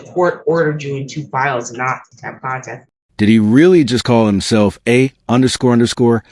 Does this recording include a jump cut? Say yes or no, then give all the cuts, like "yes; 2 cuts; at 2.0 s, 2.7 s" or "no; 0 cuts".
no; 0 cuts